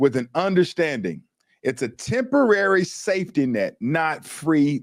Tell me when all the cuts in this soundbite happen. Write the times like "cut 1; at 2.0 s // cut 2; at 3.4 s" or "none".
none